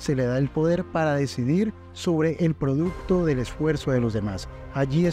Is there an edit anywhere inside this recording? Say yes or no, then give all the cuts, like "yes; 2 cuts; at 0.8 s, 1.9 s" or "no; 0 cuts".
no; 0 cuts